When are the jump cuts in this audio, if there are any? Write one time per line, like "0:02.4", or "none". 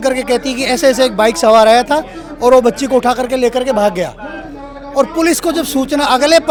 none